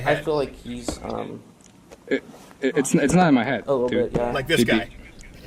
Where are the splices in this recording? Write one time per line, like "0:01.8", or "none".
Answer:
none